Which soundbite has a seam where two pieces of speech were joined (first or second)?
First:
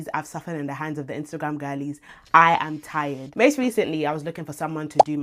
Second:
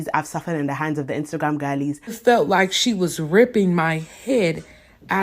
second